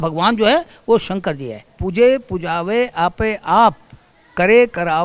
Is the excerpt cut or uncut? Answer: cut